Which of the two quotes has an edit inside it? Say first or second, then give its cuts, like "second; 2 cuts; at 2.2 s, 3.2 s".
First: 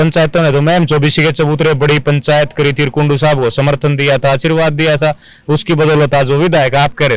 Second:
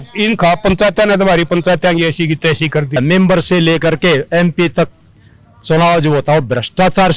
second; 1 cut; at 3.0 s